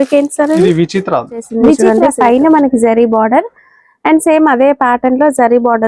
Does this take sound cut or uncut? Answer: cut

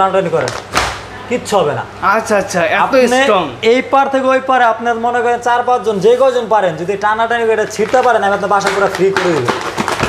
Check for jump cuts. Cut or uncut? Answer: uncut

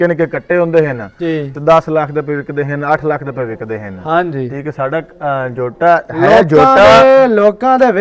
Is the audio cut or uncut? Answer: uncut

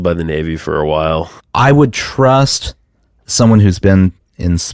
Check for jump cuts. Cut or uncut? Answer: cut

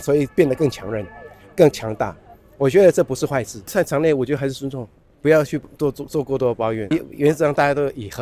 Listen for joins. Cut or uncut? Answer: cut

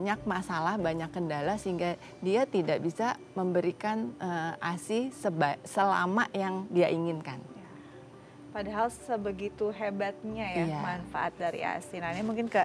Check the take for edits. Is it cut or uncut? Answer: uncut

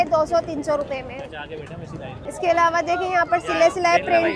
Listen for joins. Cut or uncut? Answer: uncut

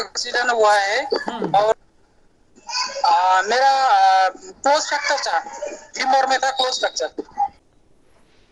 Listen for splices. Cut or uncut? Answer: cut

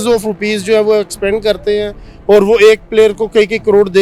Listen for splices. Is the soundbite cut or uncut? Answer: uncut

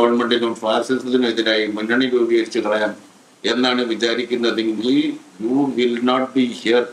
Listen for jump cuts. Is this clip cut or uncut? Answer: uncut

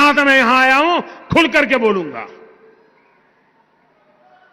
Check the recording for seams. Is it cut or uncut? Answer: uncut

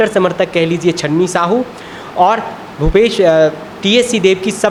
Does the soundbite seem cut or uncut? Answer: uncut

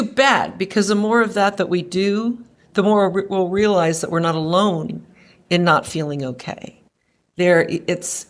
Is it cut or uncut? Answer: uncut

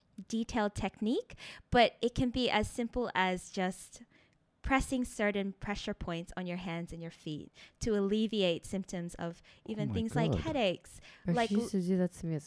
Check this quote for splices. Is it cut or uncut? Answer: uncut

